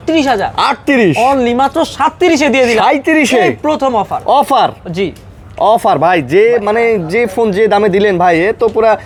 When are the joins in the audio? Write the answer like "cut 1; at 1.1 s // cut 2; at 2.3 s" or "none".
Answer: none